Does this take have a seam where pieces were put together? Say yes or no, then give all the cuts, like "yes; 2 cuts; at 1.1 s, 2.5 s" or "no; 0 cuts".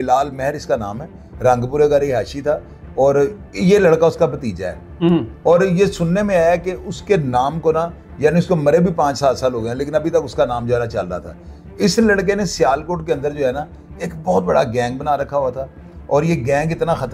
no; 0 cuts